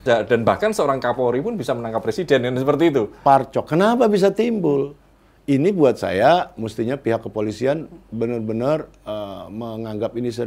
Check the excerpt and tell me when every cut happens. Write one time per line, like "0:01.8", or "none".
0:03.2